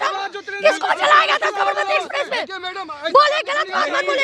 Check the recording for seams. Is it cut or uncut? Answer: uncut